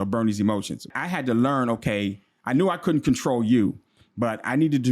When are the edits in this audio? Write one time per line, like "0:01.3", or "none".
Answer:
0:00.9

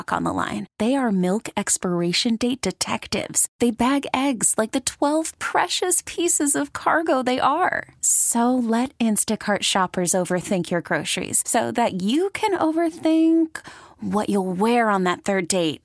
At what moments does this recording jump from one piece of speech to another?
none

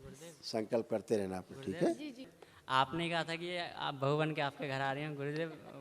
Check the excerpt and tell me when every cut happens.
0:02.3

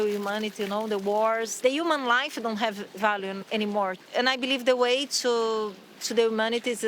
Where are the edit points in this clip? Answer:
0:01.5
0:04.0

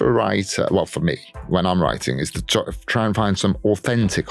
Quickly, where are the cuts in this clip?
none

